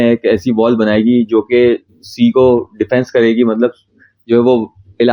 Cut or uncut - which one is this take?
uncut